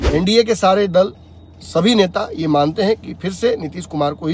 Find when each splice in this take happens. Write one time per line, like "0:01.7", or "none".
none